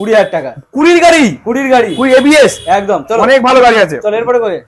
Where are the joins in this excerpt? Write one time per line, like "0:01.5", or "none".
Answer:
none